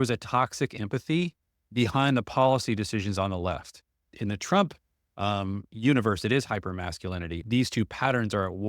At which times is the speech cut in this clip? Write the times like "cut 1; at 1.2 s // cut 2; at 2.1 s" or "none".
cut 1; at 4.1 s // cut 2; at 7.4 s